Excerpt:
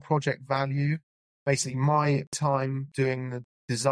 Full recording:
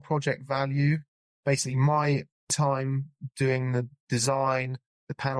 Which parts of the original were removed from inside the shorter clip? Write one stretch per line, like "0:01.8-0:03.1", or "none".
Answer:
0:02.5-0:02.9